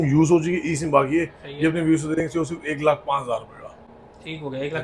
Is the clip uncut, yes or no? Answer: yes